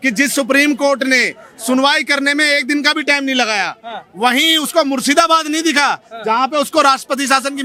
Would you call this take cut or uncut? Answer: uncut